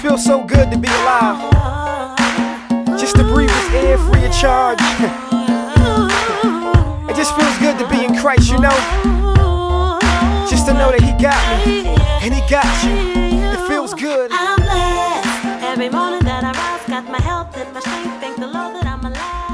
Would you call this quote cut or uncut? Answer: uncut